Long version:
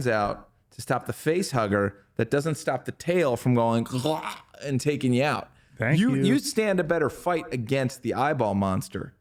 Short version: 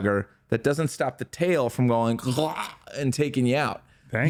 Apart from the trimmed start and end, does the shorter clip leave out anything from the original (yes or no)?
no